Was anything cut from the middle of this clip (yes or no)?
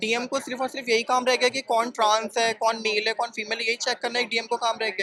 no